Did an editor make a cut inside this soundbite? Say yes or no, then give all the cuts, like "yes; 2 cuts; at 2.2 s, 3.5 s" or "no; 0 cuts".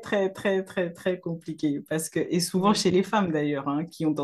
no; 0 cuts